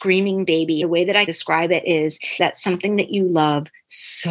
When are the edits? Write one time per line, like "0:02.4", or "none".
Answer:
0:00.9
0:02.4